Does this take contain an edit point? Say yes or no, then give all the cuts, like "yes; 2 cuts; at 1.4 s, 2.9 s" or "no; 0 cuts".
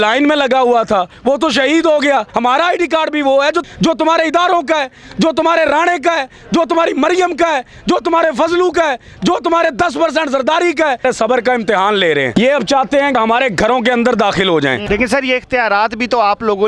yes; 5 cuts; at 2.3 s, 11.0 s, 12.3 s, 13.1 s, 14.8 s